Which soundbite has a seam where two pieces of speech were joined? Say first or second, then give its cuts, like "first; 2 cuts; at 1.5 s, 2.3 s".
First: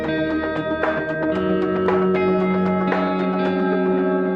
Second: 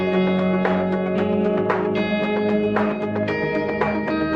first; 1 cut; at 3.1 s